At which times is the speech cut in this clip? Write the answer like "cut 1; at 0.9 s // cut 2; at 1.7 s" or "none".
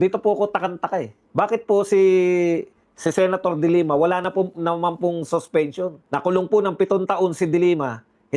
cut 1; at 1.2 s // cut 2; at 6.0 s